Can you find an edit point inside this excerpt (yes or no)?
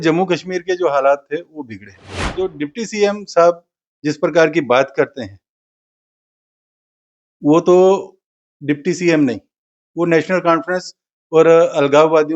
yes